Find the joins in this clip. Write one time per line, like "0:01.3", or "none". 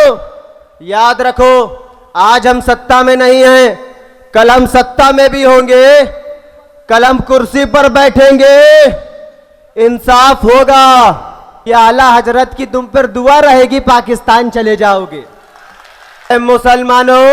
0:11.5
0:16.3